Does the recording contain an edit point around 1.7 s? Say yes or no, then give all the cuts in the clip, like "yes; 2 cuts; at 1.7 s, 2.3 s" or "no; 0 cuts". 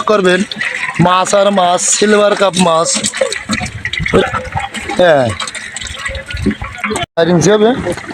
no; 1 cut; at 7.1 s